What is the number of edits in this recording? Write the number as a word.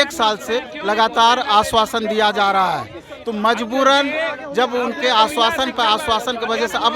zero